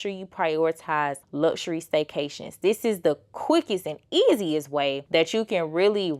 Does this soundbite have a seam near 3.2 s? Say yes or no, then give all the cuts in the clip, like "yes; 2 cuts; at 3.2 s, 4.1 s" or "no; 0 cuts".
no; 2 cuts; at 1.2 s, 5.0 s